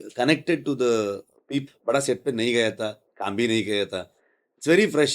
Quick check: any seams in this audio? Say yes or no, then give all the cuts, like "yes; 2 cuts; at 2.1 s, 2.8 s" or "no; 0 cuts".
yes; 1 cut; at 1.6 s